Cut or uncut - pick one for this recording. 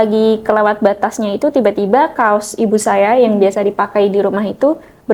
uncut